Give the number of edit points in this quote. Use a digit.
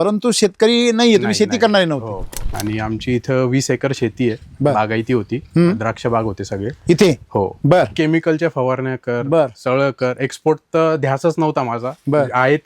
2